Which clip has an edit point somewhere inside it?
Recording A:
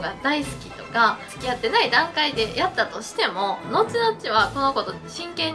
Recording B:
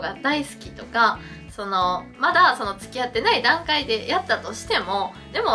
A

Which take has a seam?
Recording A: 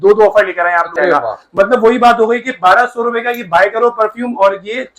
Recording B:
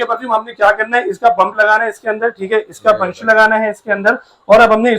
A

